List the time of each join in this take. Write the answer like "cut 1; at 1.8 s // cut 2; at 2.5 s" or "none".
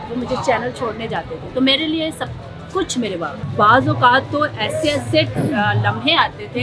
cut 1; at 3.3 s